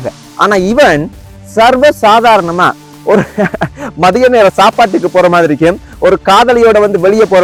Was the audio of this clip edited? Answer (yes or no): no